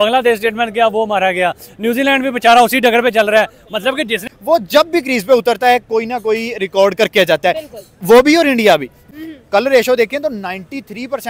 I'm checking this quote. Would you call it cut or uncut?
cut